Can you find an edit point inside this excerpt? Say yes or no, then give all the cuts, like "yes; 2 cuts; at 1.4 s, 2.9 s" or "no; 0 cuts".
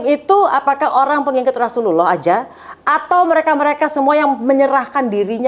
no; 0 cuts